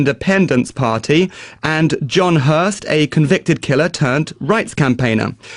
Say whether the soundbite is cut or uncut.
uncut